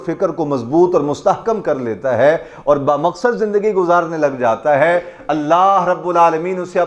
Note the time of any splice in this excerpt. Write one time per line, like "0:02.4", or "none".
none

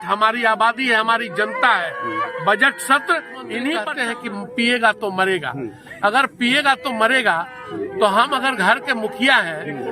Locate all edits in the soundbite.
0:03.9

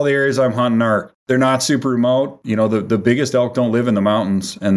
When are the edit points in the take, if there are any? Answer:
0:01.1
0:02.4

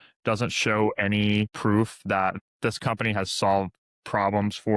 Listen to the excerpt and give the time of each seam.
0:01.5

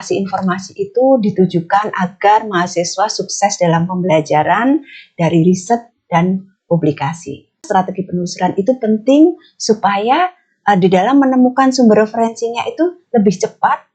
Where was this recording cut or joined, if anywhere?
0:07.6

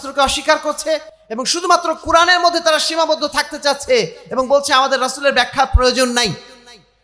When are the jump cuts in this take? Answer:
none

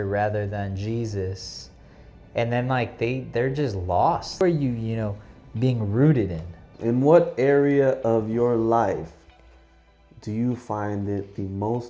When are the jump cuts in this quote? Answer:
0:04.4
0:06.7

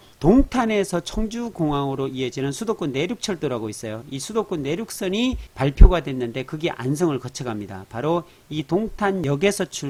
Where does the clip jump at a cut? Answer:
none

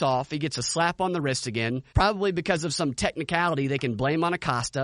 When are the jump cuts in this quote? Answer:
0:01.9

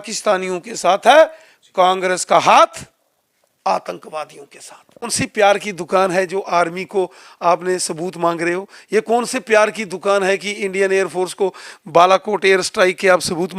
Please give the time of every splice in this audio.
0:05.1

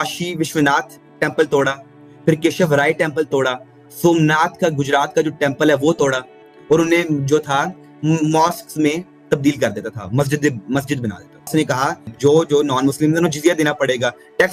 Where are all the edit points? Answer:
none

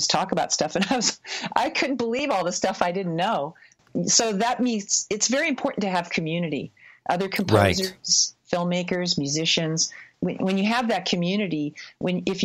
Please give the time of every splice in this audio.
0:03.8
0:10.1

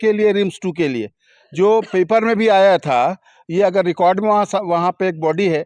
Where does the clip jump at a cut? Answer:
none

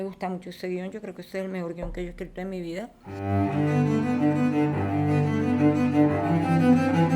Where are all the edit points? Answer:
0:03.0

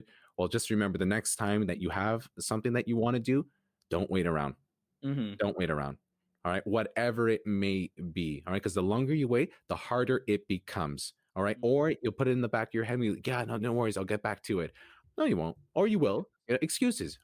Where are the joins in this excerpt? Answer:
0:14.9

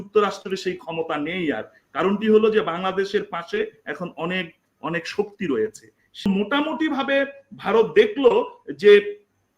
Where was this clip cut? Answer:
0:06.3

